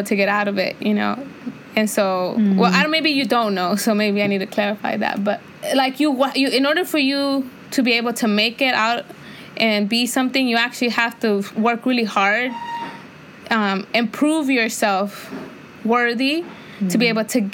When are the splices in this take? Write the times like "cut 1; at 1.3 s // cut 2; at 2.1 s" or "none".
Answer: none